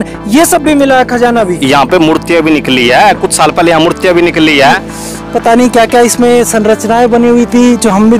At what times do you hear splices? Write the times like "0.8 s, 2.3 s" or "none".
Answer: 4.8 s

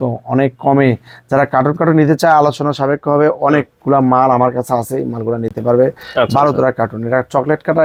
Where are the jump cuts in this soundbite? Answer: none

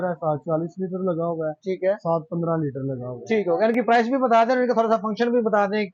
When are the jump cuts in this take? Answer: none

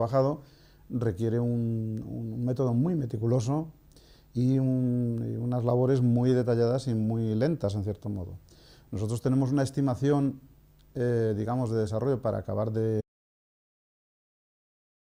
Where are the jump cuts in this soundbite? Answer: none

